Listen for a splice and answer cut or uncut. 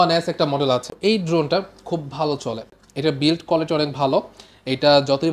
cut